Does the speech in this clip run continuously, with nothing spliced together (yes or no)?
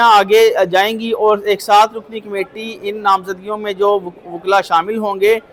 yes